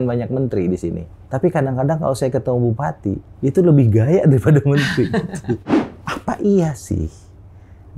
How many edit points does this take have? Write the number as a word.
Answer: three